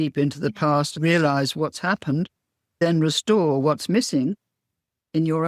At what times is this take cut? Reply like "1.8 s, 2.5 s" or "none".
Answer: 0.9 s, 2.8 s